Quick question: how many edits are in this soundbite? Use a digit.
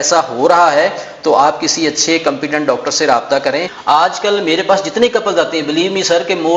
1